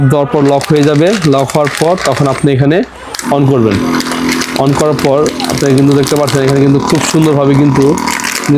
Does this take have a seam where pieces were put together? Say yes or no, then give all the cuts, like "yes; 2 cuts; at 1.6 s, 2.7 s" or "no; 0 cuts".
no; 0 cuts